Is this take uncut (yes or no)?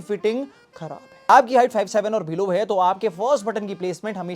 no